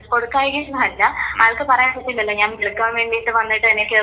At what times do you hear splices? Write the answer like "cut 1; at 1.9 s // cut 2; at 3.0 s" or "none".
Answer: none